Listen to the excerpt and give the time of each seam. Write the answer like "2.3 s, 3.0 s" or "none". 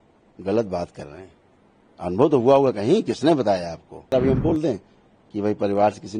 4.1 s